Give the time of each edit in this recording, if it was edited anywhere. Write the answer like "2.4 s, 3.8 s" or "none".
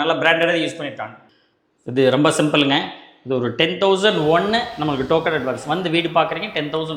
1.2 s